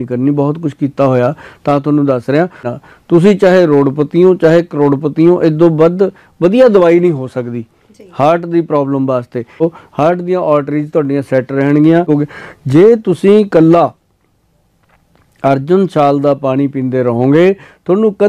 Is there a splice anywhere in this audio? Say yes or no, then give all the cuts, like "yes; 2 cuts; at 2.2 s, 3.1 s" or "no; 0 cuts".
yes; 3 cuts; at 2.6 s, 9.6 s, 12.1 s